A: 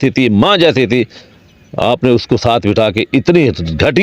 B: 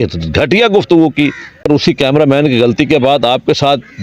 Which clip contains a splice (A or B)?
B